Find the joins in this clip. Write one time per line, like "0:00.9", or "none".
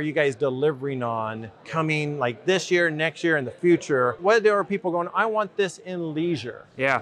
none